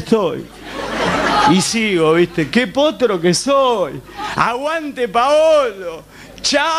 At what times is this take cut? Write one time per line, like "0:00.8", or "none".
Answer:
0:02.1